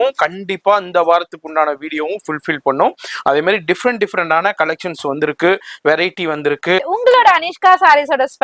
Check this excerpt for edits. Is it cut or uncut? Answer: cut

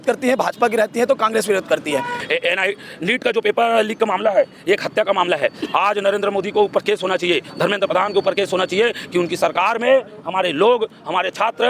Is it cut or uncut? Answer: cut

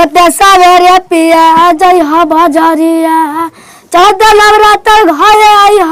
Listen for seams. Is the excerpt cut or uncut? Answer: uncut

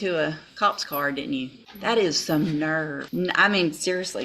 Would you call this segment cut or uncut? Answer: cut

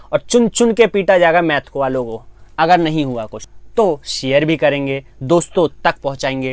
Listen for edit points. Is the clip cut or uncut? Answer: cut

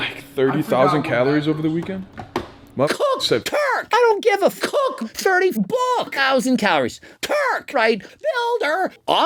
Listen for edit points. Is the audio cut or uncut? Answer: uncut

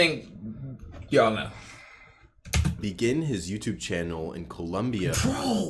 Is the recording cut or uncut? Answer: uncut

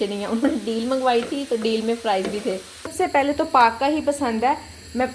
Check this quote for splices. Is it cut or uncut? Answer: cut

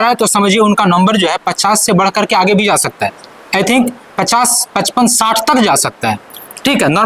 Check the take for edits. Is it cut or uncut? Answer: uncut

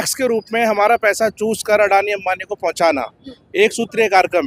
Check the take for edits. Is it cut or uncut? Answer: uncut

